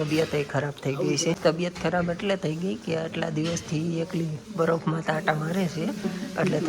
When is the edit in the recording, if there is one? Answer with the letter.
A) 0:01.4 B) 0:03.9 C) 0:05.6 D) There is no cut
A